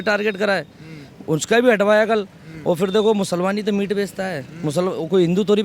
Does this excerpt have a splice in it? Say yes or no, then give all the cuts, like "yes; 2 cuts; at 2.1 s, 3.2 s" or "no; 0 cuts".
no; 0 cuts